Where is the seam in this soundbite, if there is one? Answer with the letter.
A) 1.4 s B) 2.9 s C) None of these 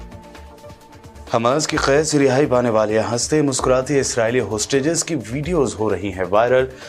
A